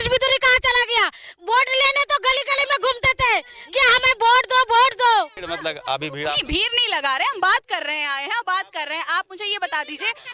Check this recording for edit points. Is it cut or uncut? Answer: cut